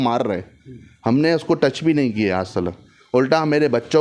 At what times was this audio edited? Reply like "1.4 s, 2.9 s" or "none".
none